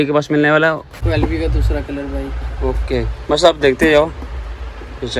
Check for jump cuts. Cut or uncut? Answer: cut